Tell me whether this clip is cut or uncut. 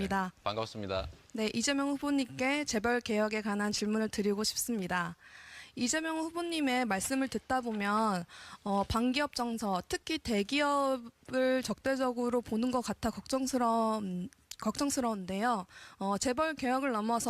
uncut